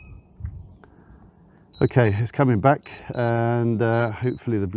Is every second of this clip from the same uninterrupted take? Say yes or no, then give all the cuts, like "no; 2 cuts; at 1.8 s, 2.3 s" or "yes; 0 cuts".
no; 1 cut; at 1.4 s